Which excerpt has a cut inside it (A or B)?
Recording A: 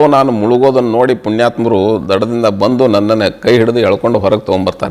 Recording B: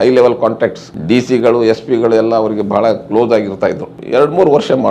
B